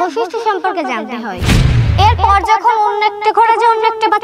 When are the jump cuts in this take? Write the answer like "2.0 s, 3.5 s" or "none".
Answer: 1.8 s